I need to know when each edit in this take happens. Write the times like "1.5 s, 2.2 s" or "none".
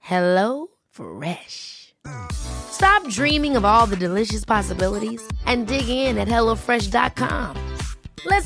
none